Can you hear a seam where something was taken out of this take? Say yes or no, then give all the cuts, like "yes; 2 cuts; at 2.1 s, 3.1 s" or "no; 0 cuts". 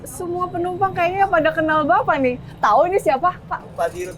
no; 0 cuts